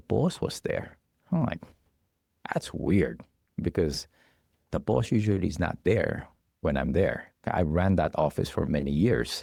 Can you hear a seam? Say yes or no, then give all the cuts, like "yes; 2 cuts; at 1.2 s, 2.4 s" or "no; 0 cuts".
no; 0 cuts